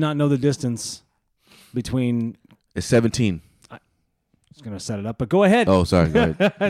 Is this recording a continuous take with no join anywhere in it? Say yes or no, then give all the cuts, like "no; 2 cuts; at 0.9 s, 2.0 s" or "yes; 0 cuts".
yes; 0 cuts